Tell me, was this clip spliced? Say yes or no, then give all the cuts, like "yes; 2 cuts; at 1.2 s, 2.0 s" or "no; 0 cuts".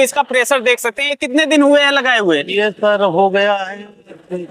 yes; 1 cut; at 1.2 s